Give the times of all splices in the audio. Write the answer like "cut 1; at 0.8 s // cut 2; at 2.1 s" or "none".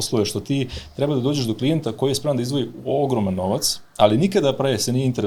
none